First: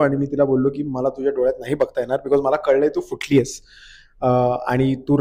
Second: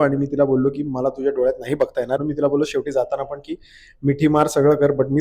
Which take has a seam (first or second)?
second